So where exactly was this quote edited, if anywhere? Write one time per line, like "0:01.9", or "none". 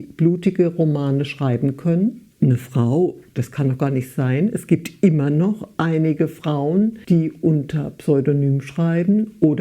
0:02.2
0:07.0

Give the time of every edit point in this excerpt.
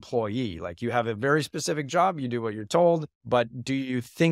0:03.1

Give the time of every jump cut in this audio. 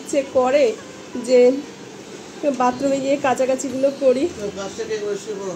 none

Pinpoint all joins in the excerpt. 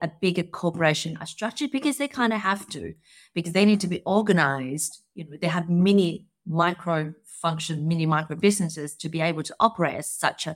none

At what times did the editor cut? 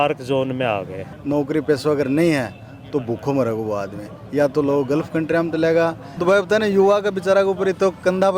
0:01.1
0:06.1

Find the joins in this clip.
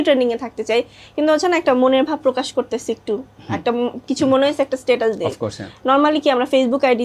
none

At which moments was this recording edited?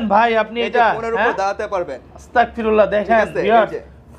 none

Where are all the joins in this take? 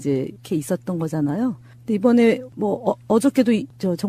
none

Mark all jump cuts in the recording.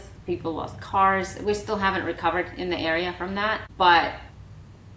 0:03.7

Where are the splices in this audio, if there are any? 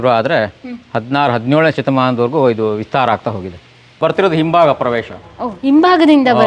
0:04.0

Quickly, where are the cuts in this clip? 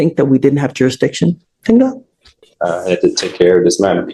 none

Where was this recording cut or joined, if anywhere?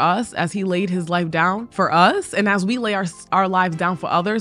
0:01.7

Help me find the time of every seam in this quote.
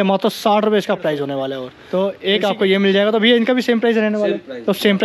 0:01.7

